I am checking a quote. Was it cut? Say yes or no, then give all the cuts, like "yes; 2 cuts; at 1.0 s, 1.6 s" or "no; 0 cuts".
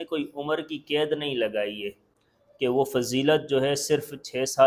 no; 0 cuts